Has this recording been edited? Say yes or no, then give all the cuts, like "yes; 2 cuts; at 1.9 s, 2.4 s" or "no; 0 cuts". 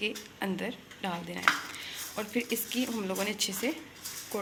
no; 0 cuts